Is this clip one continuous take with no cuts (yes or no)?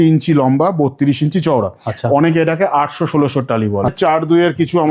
no